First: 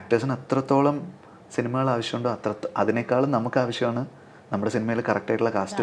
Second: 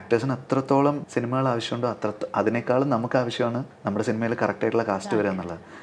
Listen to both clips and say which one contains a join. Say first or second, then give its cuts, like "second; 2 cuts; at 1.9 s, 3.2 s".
second; 2 cuts; at 1.0 s, 3.7 s